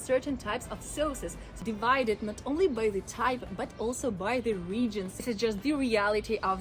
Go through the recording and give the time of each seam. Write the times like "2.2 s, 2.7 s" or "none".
1.4 s, 5.2 s